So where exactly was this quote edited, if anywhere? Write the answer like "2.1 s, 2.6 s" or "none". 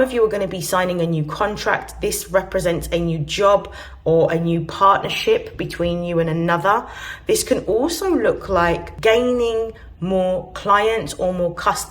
8.9 s